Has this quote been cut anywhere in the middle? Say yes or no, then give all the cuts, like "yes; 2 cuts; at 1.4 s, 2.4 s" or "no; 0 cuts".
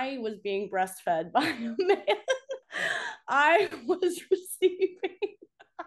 yes; 1 cut; at 2.6 s